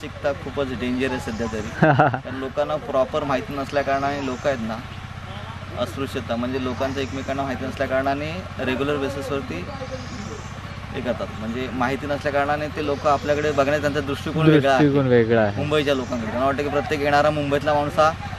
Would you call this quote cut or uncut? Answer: uncut